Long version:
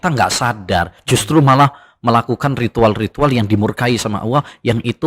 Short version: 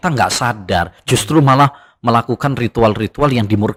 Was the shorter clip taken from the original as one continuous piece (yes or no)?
yes